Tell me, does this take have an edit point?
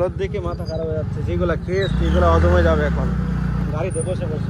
no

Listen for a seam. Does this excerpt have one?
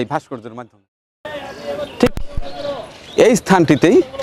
yes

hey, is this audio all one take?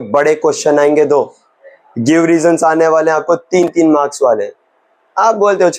yes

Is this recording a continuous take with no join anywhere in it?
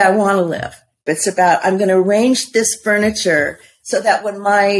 no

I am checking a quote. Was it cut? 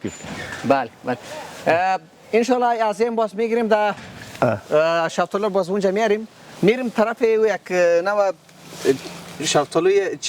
no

